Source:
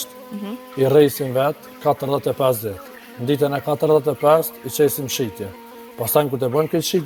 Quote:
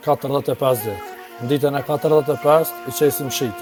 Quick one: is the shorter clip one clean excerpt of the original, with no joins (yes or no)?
yes